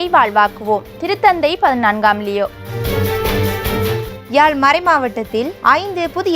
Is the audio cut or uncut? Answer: cut